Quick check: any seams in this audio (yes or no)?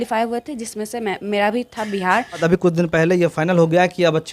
yes